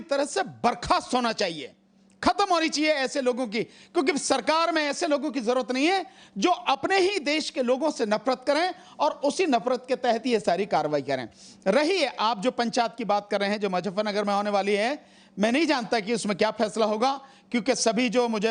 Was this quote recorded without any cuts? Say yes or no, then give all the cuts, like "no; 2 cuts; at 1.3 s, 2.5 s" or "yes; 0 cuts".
yes; 0 cuts